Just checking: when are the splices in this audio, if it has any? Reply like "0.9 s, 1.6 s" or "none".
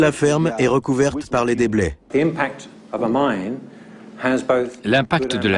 2.0 s